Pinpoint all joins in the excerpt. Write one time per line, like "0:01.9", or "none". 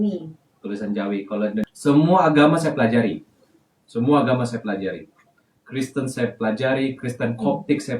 0:01.7